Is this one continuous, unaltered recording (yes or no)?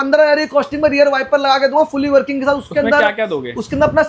yes